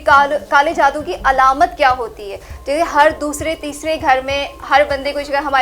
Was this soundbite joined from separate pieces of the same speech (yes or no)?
no